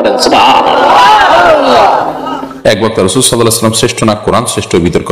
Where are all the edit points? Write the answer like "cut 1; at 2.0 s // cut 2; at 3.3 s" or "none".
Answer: cut 1; at 2.4 s